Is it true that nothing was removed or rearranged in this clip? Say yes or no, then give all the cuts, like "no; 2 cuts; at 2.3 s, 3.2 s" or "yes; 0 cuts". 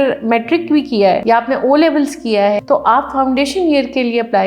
no; 2 cuts; at 1.2 s, 2.6 s